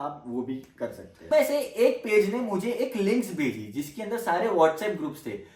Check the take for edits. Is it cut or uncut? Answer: cut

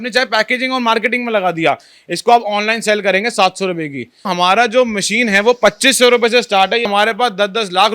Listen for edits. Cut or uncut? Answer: cut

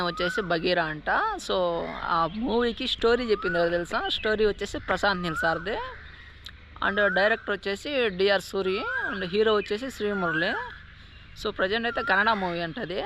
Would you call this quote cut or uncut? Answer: uncut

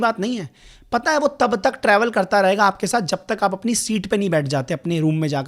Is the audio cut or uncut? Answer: uncut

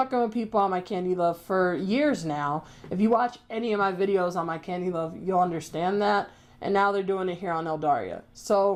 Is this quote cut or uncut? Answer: uncut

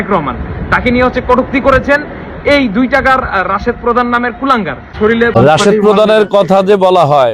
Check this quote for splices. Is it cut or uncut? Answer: cut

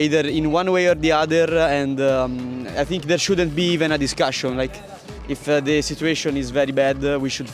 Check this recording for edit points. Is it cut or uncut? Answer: uncut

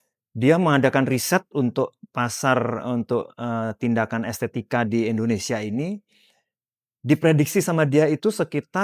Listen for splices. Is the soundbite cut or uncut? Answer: uncut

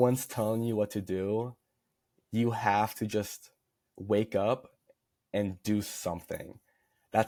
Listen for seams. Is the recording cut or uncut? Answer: uncut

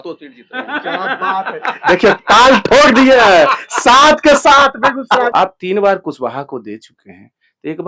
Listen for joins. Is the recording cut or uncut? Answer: cut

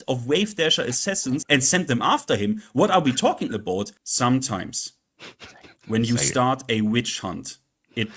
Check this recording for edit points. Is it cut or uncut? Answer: cut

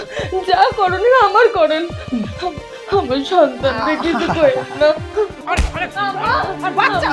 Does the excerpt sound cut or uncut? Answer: cut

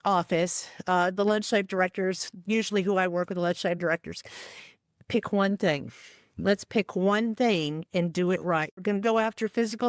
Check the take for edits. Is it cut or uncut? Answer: cut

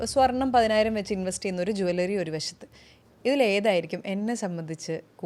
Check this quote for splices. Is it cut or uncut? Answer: uncut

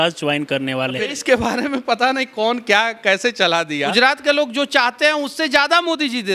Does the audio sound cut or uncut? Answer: cut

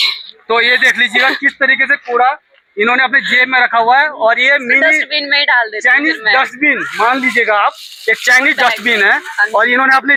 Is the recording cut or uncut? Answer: uncut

